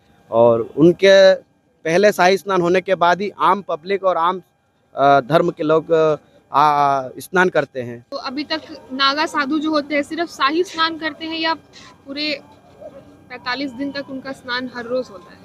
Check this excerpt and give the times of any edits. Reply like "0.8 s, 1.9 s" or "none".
8.0 s